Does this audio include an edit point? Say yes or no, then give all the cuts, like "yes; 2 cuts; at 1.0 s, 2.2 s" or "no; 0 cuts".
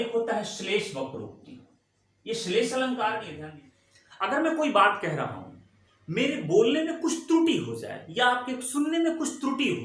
yes; 1 cut; at 3.4 s